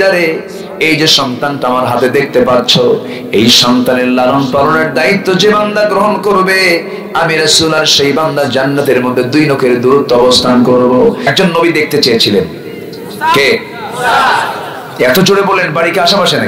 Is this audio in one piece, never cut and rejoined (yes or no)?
no